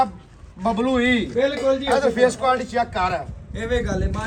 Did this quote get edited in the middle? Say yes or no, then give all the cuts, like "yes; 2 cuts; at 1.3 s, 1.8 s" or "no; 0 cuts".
no; 0 cuts